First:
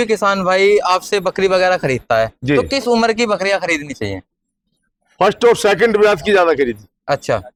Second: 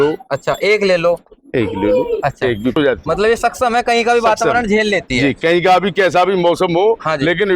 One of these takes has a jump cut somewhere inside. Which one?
second; 1 cut; at 2.8 s

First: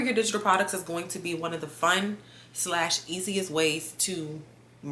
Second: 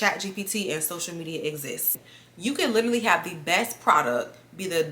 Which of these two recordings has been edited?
second; 1 cut; at 1.9 s

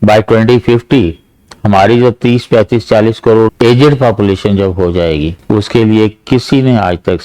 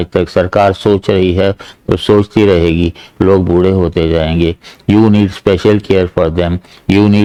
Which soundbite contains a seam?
first; 2 cuts; at 3.5 s, 5.3 s

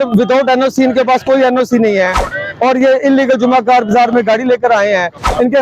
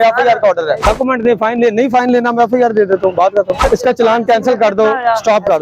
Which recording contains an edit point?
second; 2 cuts; at 0.8 s, 3.7 s

